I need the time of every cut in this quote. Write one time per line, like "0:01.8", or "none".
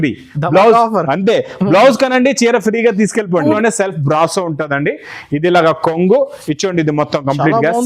0:03.6

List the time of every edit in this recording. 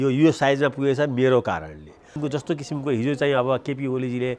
0:02.1

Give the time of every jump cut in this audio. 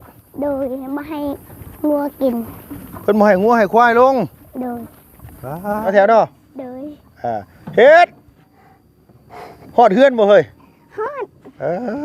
0:05.8

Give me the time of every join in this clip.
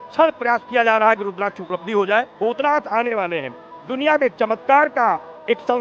0:02.3

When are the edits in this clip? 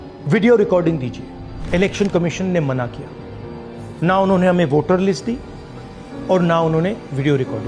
none

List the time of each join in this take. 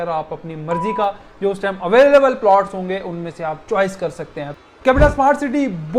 0:04.7

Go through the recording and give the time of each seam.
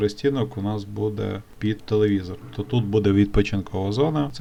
none

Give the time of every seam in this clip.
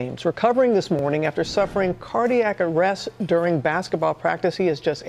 none

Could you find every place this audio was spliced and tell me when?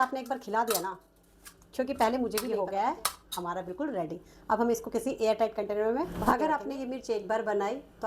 0:02.5
0:06.1

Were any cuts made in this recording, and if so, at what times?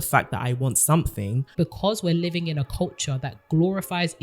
0:01.5

